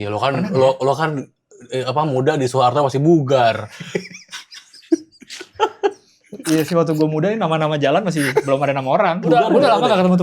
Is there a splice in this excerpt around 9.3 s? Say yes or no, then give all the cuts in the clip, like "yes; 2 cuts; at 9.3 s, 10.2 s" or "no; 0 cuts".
yes; 1 cut; at 9.3 s